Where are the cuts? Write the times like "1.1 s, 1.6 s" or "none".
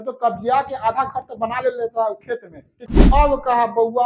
2.9 s

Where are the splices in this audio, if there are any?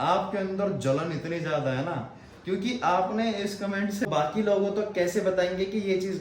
4.1 s

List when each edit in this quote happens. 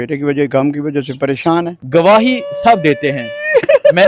1.8 s

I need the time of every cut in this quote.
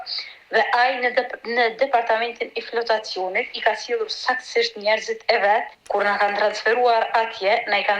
5.8 s

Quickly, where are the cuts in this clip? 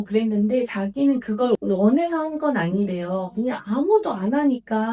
1.6 s

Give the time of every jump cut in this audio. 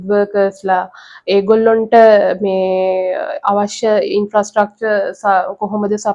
none

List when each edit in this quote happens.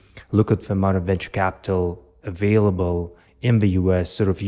none

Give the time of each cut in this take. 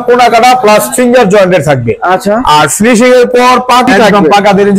3.9 s

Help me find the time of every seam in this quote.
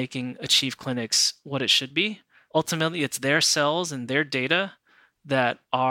2.5 s

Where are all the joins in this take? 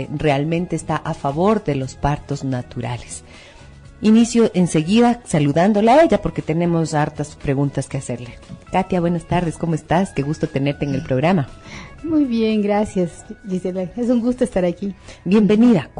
none

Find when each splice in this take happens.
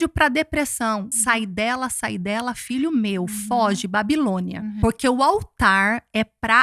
1.1 s, 4.7 s

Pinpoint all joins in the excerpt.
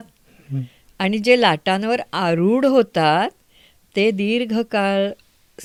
none

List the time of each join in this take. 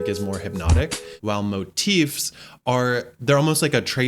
1.1 s

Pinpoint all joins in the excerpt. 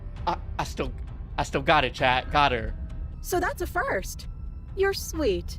3.1 s

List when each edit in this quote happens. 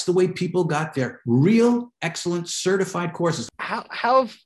3.4 s

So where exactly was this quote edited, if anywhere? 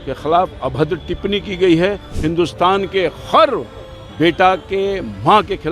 2.1 s

